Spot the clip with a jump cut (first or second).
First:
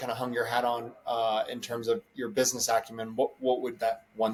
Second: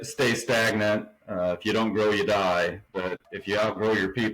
second